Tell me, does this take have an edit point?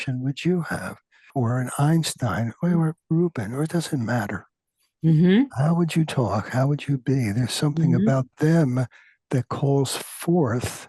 yes; 1 cut; at 1.2 s

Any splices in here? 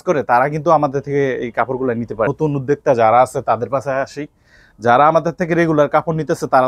yes; 1 cut; at 2.3 s

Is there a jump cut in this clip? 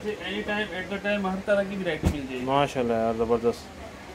no; 0 cuts

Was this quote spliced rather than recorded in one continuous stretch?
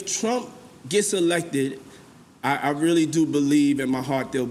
no; 0 cuts

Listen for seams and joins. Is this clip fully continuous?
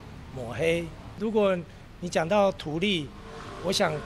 no; 1 cut; at 1.2 s

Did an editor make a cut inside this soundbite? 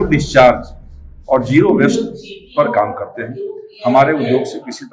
no; 0 cuts

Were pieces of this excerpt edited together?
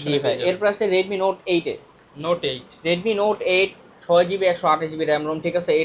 no; 0 cuts

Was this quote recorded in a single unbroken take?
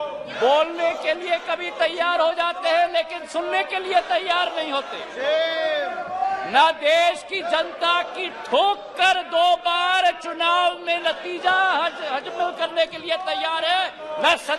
yes; 0 cuts

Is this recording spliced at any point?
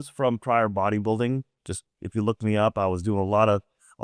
no; 0 cuts

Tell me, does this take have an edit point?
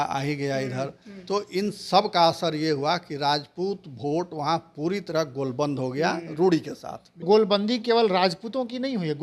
yes; 1 cut; at 7.2 s

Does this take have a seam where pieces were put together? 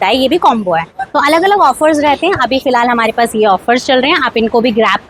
no; 0 cuts

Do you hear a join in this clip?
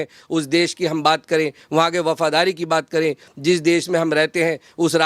no; 0 cuts

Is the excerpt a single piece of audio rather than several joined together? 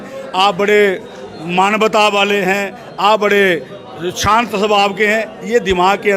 yes; 0 cuts

